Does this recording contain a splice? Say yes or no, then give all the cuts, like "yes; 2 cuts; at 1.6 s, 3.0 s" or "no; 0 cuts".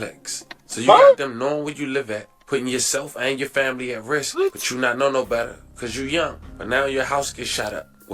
no; 0 cuts